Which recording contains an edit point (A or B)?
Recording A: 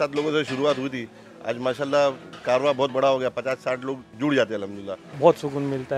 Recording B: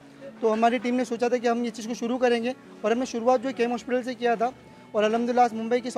A